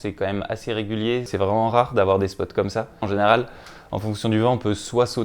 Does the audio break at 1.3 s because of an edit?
yes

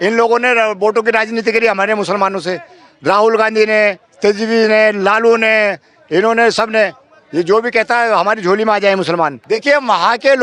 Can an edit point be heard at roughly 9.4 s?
yes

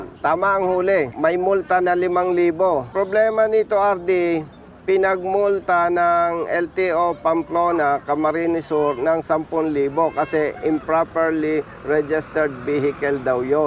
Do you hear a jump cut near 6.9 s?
no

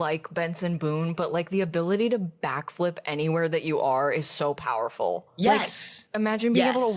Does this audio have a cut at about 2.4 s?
no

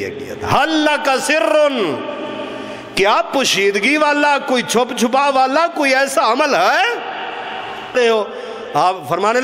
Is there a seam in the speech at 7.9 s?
yes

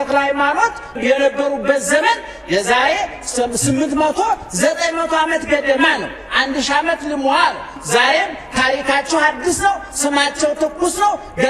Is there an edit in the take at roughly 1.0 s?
yes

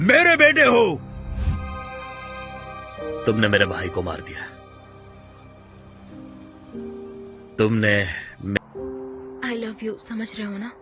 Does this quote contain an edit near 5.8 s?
no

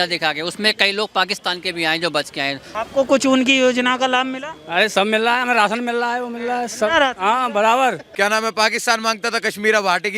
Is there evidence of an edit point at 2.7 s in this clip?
yes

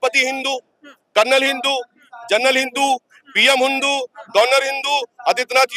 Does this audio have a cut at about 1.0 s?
no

